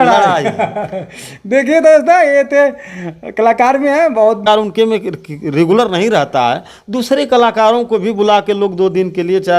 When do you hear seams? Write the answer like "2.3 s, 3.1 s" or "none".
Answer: 4.4 s